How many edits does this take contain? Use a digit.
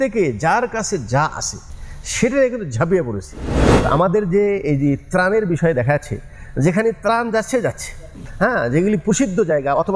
2